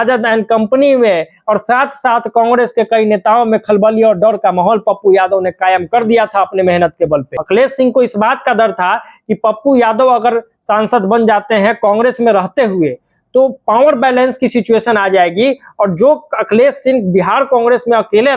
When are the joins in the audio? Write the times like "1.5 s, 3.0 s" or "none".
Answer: 7.4 s